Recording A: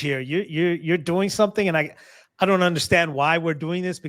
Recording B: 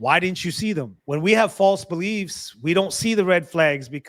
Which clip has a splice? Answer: B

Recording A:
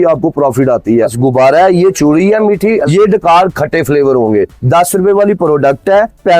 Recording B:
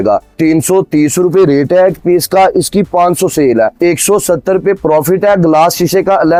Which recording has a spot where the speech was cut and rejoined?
A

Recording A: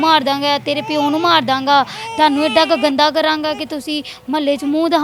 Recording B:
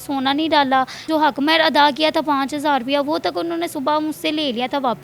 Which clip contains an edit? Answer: B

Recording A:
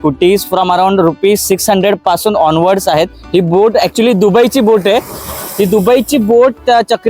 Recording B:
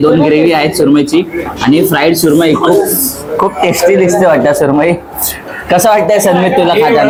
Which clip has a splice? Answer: A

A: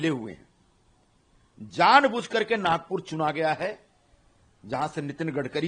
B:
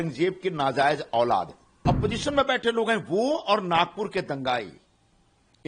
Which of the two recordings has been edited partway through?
B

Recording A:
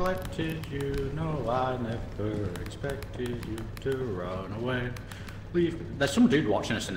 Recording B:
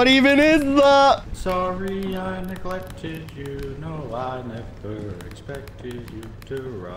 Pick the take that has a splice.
B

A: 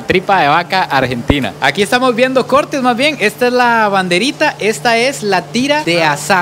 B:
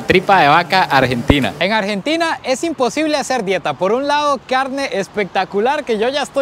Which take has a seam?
B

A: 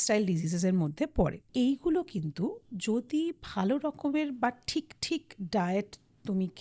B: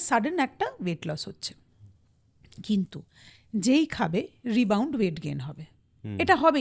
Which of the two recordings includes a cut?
A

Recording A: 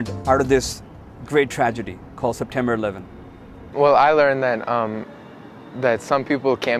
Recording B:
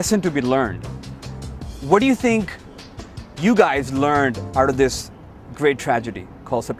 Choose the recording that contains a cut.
A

